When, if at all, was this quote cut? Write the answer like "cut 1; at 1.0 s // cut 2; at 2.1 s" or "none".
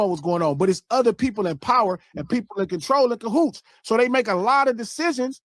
none